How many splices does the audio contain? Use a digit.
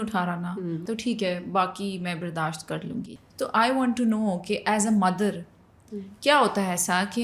2